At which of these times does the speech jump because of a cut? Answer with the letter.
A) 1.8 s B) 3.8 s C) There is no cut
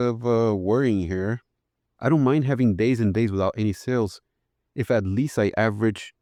C